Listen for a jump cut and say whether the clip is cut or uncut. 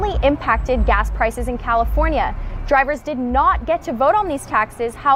uncut